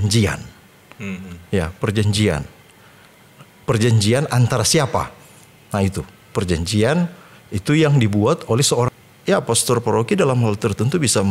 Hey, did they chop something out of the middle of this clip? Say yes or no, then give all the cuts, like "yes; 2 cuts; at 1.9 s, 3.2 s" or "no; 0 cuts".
yes; 1 cut; at 8.9 s